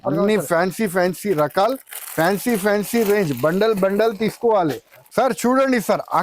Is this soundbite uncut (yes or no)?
no